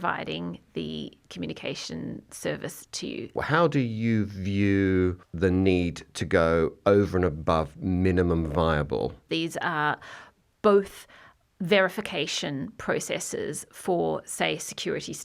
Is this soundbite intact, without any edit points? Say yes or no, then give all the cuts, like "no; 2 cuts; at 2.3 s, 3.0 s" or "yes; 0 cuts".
no; 3 cuts; at 3.3 s, 5.2 s, 9.2 s